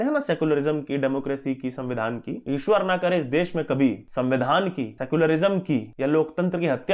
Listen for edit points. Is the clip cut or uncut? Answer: cut